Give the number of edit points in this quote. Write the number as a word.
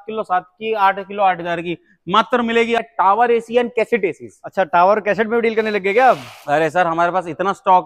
one